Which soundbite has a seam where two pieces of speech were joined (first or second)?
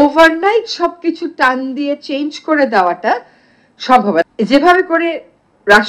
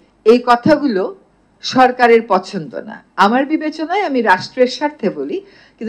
first